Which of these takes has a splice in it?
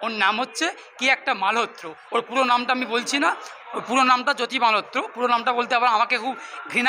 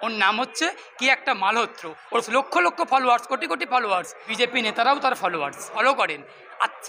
second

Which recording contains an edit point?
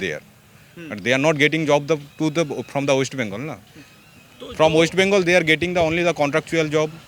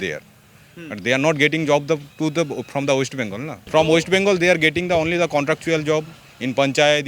second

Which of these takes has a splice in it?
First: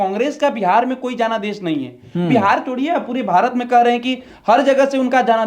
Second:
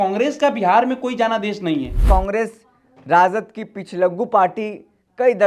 second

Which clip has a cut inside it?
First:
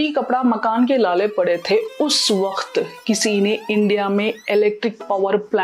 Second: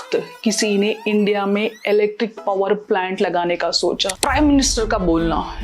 second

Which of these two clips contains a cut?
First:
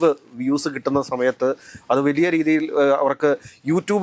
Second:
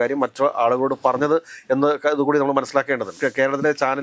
second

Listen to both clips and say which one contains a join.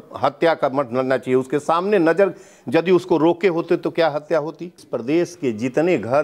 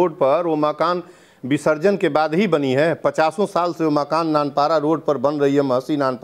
first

